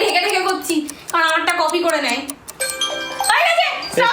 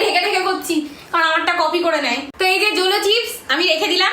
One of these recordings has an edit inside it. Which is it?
second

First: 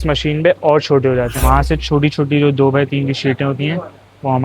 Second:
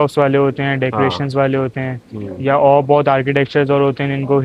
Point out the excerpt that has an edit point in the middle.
first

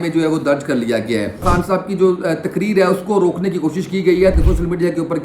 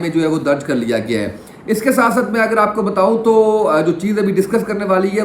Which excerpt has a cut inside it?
first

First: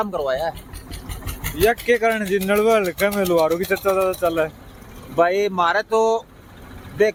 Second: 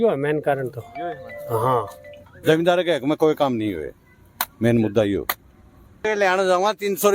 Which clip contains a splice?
second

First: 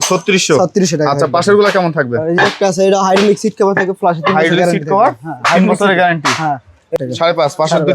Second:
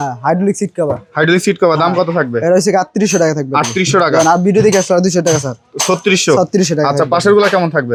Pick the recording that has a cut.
first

